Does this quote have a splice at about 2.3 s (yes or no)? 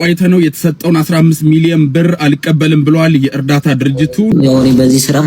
no